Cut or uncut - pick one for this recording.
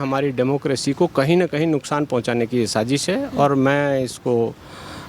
uncut